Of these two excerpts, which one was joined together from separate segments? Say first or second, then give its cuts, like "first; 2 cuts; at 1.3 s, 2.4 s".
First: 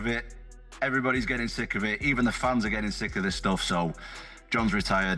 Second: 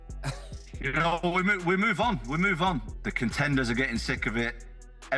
second; 1 cut; at 2.9 s